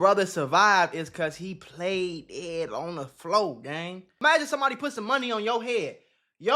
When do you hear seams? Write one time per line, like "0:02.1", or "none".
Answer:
0:04.1